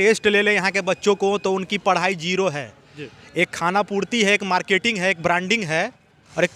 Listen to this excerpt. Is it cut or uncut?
uncut